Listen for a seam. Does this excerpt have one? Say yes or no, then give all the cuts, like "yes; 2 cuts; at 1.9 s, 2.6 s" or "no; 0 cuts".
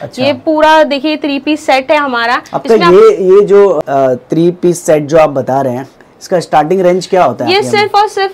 no; 0 cuts